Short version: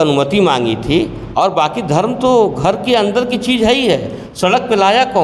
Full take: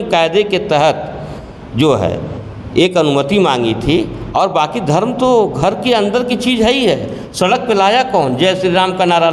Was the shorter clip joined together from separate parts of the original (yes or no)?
no